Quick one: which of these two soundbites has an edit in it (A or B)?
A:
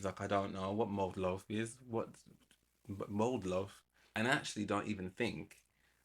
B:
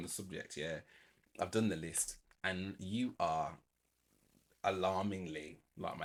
A